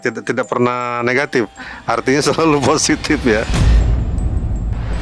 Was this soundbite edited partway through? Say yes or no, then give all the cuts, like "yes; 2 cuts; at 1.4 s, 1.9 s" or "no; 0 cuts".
yes; 1 cut; at 3.5 s